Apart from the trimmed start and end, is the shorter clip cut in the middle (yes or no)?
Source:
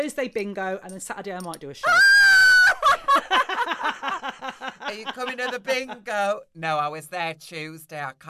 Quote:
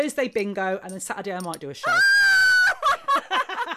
no